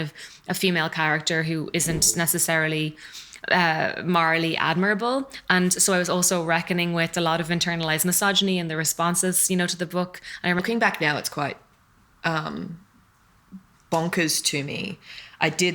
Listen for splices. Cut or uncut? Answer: cut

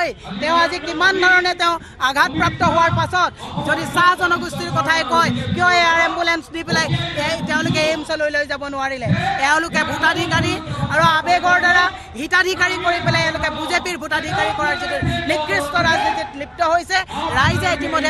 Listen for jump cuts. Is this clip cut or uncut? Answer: uncut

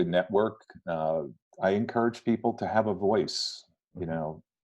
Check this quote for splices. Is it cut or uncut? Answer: cut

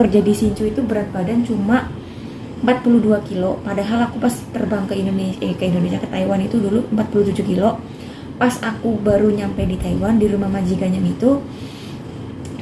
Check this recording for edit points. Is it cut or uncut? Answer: uncut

